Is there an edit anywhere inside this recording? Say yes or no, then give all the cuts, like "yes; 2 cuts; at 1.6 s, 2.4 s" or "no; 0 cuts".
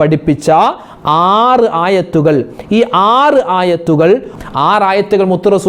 yes; 1 cut; at 4.3 s